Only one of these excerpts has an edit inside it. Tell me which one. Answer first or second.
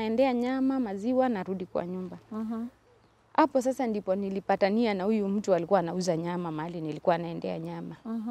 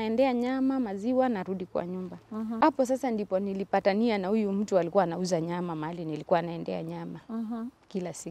second